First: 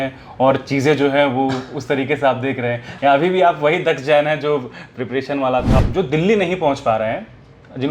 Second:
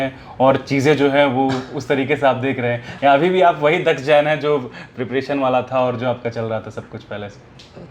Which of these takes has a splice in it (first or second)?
first